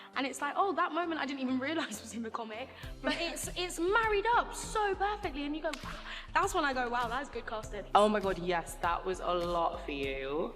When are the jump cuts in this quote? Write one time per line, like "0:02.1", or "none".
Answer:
0:07.8